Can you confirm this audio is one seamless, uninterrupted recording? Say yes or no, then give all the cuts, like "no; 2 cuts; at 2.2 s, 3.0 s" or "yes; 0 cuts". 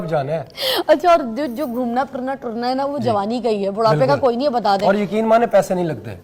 yes; 0 cuts